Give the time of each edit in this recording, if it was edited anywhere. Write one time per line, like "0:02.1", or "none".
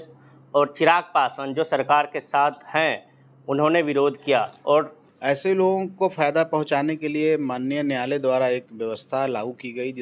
0:05.1